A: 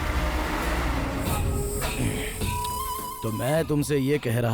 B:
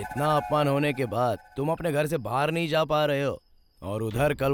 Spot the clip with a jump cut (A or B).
A